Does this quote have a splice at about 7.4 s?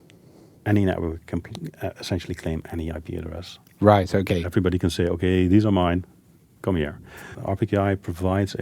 yes; 1 cut; at 7.4 s

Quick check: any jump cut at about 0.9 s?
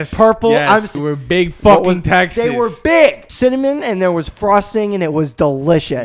yes; 2 cuts; at 0.9 s, 3.3 s

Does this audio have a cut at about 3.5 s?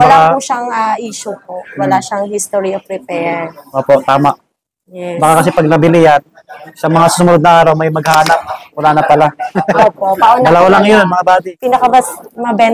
no; 1 cut; at 11.5 s

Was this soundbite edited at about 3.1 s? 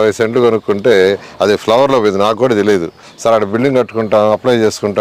yes; 1 cut; at 3.1 s

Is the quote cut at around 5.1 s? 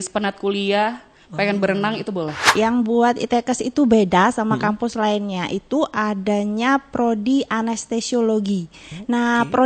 no; 1 cut; at 2.4 s

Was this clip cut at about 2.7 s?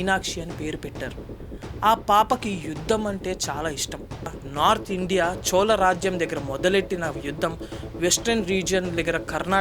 no; 1 cut; at 4.4 s

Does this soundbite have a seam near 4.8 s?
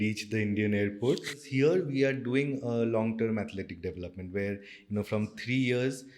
no; 1 cut; at 1.5 s

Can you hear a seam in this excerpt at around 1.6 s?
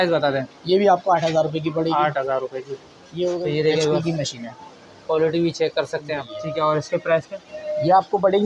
no; 2 cuts; at 3.3 s, 6.3 s

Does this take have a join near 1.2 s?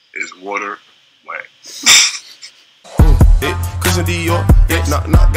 no; 1 cut; at 2.8 s

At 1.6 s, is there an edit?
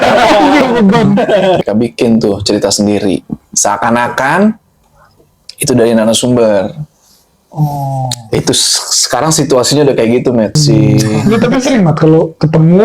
yes; 2 cuts; at 1.6 s, 10.6 s

